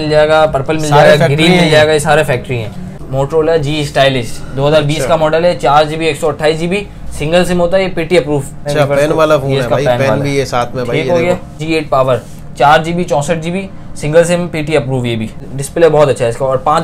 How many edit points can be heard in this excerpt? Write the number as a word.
four